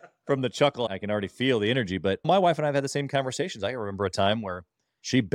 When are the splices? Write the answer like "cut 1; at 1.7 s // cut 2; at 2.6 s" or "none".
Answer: cut 1; at 0.9 s // cut 2; at 2.3 s